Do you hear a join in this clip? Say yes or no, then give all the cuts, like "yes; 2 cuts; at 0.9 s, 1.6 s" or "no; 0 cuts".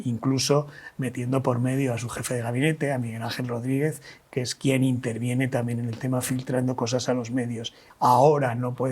yes; 1 cut; at 7.8 s